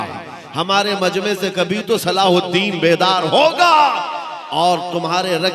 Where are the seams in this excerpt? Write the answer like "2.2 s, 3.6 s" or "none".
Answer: none